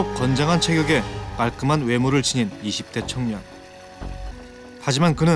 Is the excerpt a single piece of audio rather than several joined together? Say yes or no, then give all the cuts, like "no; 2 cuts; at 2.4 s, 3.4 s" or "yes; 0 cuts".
no; 1 cut; at 4.3 s